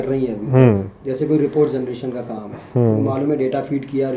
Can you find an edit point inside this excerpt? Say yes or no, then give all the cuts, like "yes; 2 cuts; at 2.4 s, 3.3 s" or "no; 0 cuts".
no; 0 cuts